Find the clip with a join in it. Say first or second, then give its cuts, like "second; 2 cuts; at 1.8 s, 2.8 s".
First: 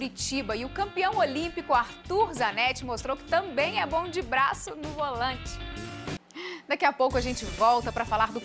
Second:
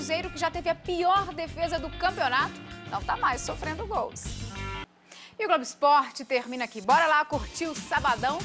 second; 1 cut; at 4.9 s